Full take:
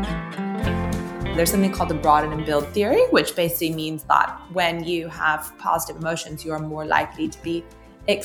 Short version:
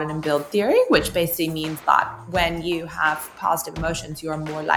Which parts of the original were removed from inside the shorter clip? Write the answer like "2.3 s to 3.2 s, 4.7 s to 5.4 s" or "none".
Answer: none